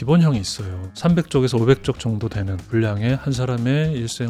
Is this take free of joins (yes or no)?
yes